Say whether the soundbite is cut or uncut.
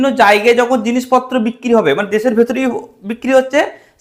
uncut